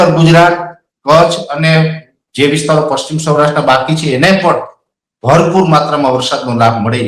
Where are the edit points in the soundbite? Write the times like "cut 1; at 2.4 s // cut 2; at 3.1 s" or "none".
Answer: none